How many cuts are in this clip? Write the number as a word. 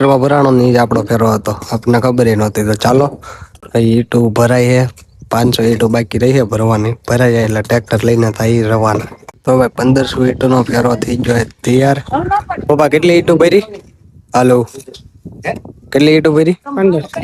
zero